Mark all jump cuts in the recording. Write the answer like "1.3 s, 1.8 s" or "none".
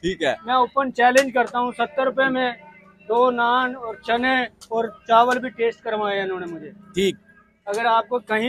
none